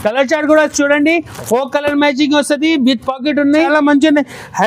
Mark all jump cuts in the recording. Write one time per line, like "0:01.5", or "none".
0:03.7

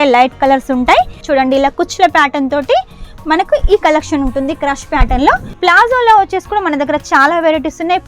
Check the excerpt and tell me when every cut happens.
0:01.2
0:05.5

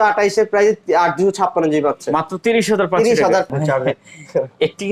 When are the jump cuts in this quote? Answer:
0:03.5

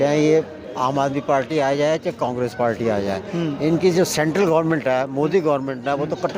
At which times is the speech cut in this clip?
none

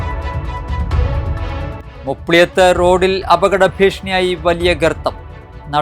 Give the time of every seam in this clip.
0:01.9

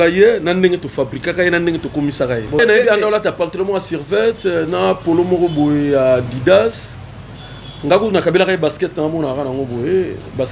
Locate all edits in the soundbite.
0:02.6

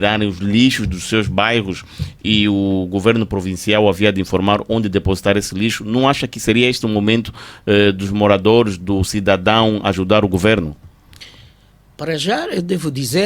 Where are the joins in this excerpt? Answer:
none

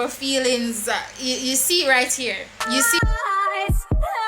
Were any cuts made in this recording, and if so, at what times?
0:02.9

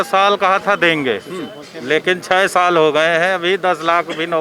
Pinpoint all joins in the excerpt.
none

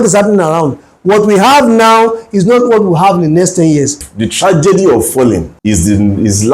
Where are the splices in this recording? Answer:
0:04.1
0:05.5

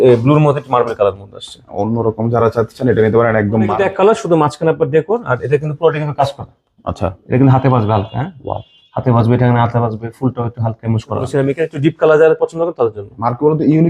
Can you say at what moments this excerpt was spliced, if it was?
0:03.7
0:11.3

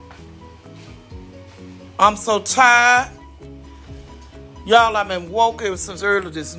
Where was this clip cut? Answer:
0:03.1
0:04.6

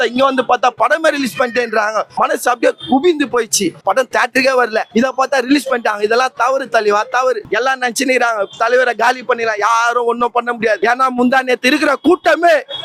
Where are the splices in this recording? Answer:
0:03.8
0:04.9
0:07.4
0:10.8

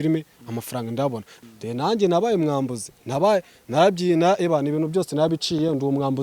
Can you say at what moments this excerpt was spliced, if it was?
0:01.3

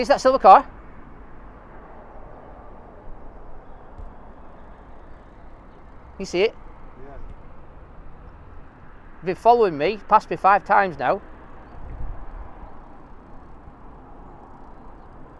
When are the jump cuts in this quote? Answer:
none

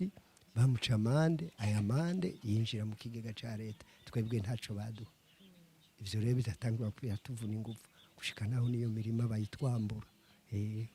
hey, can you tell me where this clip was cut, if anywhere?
none

